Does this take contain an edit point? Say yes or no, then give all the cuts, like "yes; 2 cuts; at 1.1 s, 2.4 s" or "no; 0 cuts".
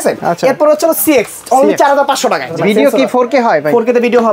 yes; 1 cut; at 2.6 s